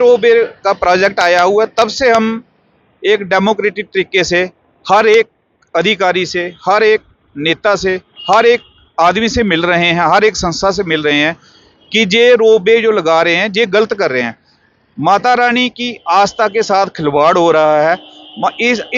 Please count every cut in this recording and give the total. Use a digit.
0